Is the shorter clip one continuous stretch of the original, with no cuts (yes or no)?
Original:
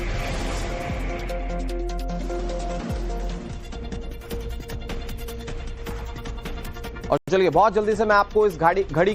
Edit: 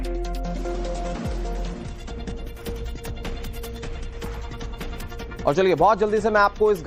no